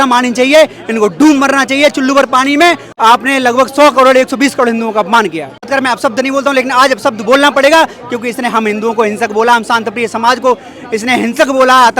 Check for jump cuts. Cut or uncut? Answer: cut